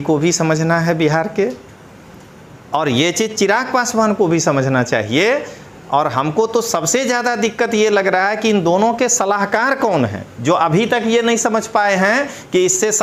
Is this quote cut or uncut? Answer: uncut